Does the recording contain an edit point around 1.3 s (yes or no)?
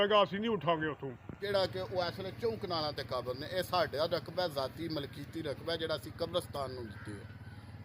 yes